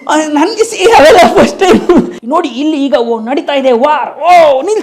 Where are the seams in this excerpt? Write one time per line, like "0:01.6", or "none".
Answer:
0:02.2